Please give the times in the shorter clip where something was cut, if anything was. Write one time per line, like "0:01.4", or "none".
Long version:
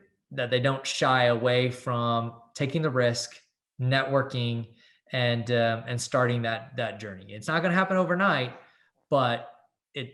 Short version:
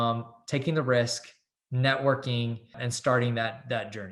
0:02.8